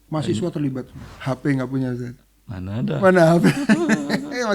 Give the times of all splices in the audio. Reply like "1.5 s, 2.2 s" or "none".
1.0 s